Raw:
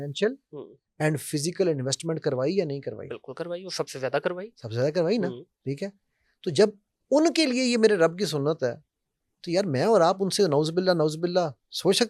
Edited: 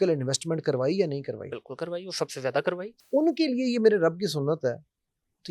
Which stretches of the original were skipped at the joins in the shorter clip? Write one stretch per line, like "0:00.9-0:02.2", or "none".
0:04.5-0:06.9